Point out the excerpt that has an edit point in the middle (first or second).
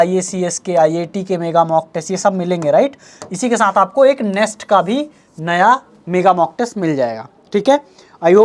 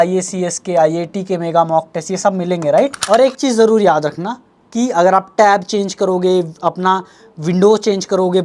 second